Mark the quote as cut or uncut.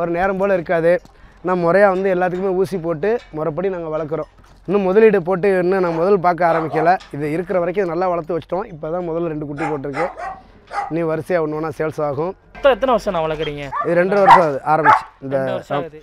uncut